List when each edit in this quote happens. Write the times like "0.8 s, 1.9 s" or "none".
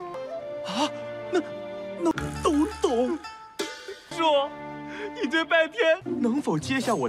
6.1 s